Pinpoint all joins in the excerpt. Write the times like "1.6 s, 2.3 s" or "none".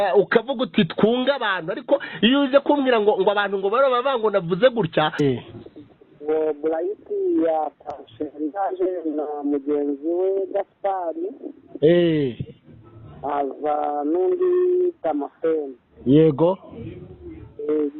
5.2 s